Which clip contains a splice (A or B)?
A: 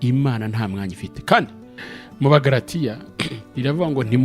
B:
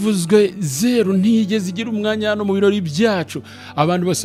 A